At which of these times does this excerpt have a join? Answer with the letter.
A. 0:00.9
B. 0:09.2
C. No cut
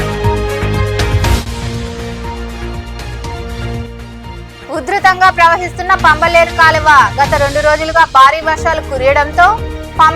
A